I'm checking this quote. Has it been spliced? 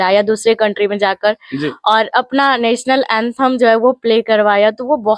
no; 0 cuts

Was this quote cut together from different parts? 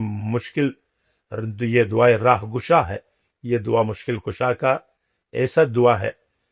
no; 0 cuts

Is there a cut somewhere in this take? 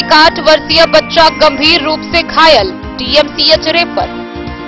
no; 0 cuts

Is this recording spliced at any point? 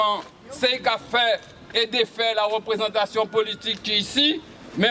no; 0 cuts

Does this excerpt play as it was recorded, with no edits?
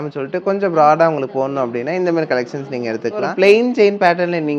no; 1 cut; at 3.3 s

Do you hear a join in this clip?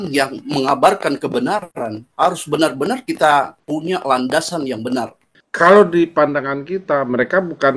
yes; 1 cut; at 5.4 s

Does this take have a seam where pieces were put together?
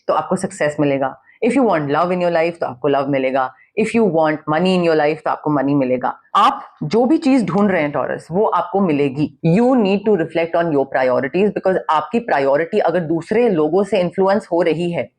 yes; 2 cuts; at 6.2 s, 9.3 s

